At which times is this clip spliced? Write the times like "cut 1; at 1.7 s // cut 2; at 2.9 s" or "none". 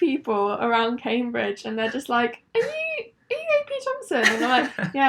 none